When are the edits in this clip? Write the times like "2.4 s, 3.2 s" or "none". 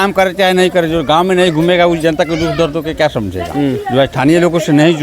none

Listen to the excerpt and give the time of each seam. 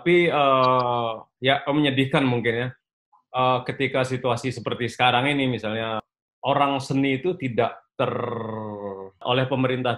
6.1 s, 9.2 s

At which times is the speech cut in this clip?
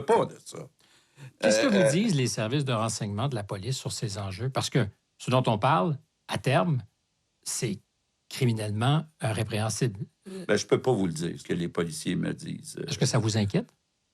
11.4 s

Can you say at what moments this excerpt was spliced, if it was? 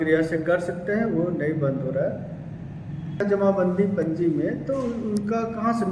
3.2 s

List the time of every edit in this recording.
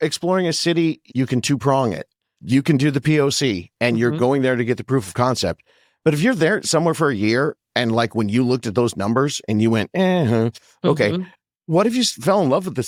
none

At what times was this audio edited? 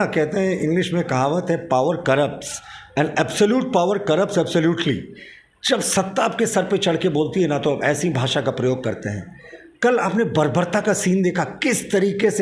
none

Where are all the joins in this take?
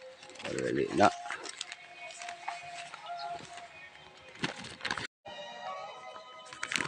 5.2 s

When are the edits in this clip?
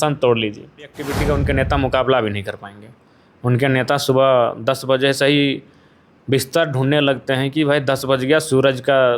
1.1 s

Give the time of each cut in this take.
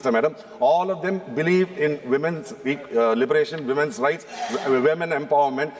none

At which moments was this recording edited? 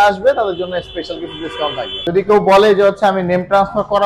1.9 s

